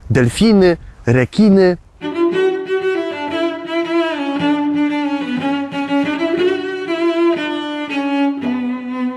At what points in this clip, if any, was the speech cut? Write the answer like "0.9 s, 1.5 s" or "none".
1.9 s